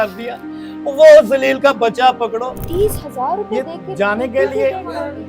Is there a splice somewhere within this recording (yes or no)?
yes